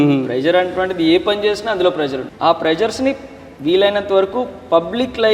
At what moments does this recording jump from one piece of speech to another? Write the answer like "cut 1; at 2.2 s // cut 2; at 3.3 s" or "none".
cut 1; at 2.2 s